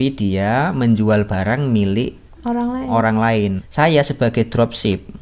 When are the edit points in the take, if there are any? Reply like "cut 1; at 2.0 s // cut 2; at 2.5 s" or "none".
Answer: cut 1; at 3.6 s